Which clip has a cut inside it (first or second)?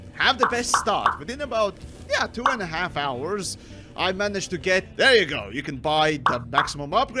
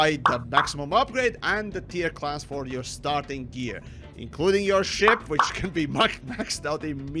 first